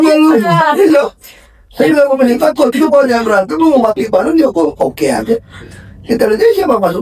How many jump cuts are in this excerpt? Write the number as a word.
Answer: zero